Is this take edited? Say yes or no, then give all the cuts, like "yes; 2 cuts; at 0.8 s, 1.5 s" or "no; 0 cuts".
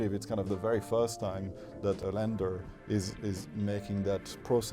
yes; 1 cut; at 2.0 s